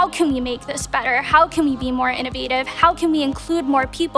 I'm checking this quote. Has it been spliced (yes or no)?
no